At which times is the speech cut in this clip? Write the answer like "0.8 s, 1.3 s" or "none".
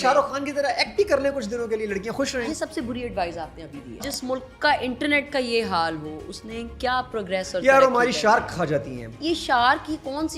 2.3 s, 4.1 s, 9.0 s